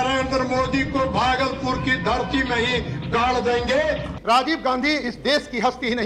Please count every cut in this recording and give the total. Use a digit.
1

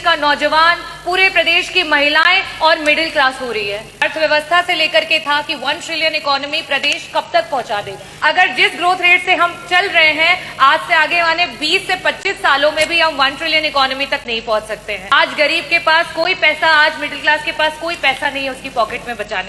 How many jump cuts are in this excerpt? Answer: 3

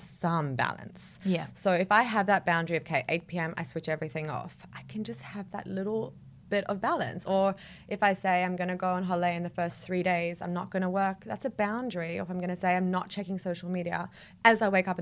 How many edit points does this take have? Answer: 0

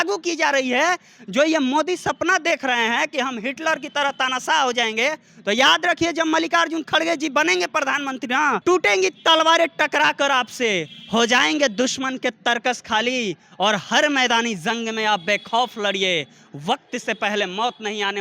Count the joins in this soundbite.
1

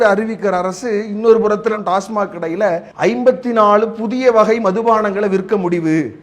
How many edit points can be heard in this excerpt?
1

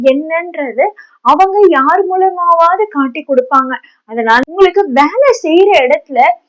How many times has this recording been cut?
1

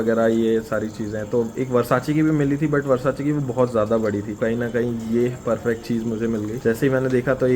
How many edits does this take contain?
2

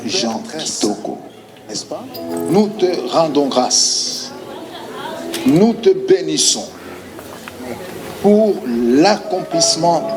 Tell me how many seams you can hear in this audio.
1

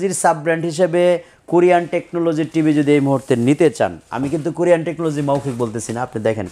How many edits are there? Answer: 0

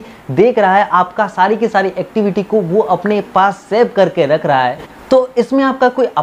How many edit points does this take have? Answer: 0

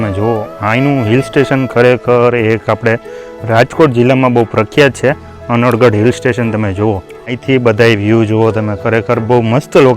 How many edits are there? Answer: 1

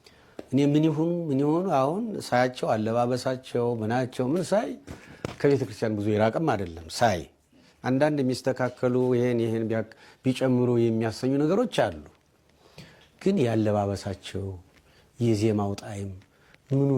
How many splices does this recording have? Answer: 0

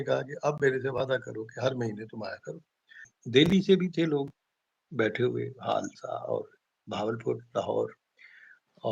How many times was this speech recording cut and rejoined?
1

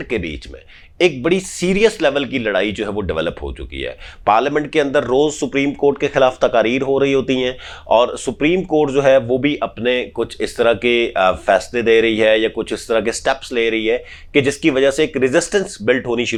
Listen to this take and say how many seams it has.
0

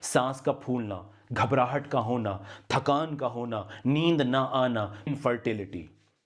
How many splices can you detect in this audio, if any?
1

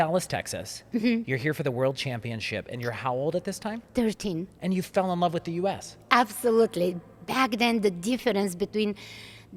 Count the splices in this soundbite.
0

